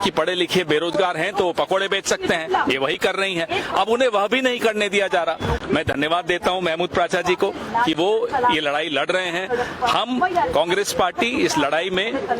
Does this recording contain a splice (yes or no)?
no